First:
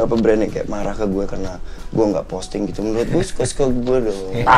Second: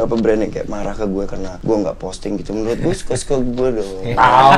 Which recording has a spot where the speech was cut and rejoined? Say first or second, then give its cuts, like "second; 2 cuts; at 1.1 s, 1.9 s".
second; 1 cut; at 1.5 s